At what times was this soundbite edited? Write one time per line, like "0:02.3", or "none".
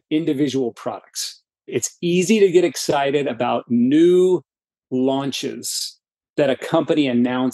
0:01.7